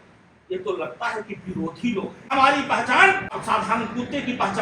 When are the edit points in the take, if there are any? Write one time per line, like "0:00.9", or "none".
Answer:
0:02.2
0:03.4